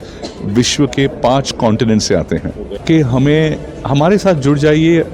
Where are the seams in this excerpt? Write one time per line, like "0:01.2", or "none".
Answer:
0:02.8